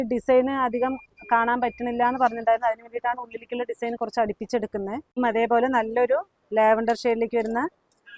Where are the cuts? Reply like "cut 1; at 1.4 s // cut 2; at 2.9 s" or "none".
cut 1; at 5.2 s